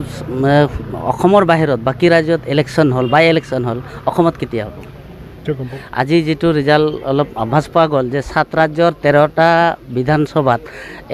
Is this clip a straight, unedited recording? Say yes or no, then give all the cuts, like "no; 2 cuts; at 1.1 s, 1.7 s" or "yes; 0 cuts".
no; 1 cut; at 5.4 s